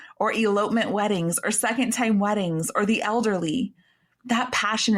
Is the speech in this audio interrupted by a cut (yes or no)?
no